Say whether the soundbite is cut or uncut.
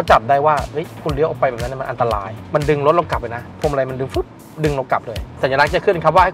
cut